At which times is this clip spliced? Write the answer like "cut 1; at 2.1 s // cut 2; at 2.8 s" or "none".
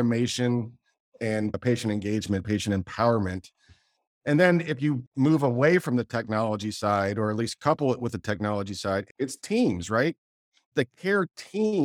cut 1; at 5.1 s // cut 2; at 9.1 s // cut 3; at 10.7 s